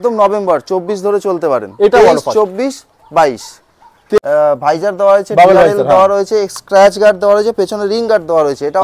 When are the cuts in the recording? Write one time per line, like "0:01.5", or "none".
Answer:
0:04.2